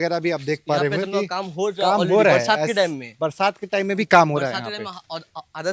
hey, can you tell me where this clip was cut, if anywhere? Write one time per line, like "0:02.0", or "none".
none